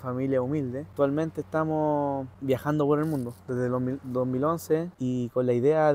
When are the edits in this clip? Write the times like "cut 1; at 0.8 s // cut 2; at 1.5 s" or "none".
cut 1; at 0.9 s // cut 2; at 2.3 s // cut 3; at 4.9 s